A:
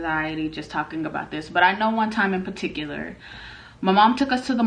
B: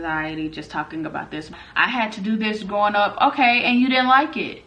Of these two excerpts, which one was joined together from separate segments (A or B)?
B